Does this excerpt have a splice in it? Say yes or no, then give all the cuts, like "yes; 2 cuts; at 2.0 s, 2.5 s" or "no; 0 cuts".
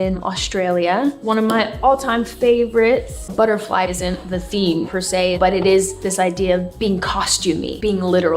yes; 1 cut; at 3.2 s